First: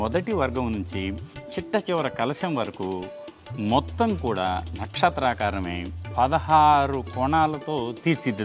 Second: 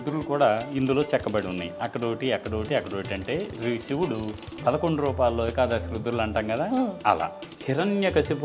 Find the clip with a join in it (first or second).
second